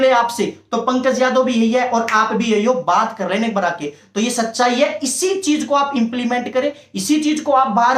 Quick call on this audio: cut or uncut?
uncut